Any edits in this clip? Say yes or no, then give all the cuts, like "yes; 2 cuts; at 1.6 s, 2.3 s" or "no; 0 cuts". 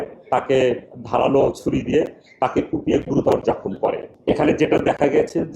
yes; 1 cut; at 4.1 s